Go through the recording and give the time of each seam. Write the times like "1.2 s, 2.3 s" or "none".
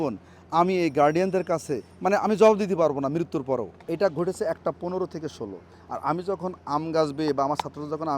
3.8 s